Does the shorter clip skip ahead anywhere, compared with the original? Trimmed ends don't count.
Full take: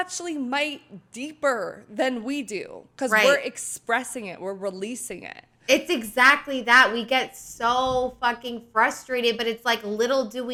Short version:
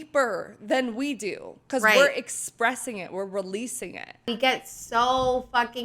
yes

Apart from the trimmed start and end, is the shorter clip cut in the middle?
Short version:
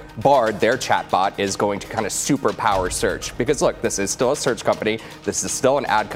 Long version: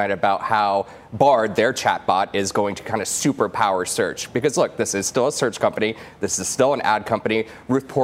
no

